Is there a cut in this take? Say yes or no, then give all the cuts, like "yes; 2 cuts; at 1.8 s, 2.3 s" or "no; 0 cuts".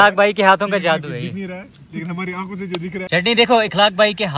yes; 1 cut; at 3.1 s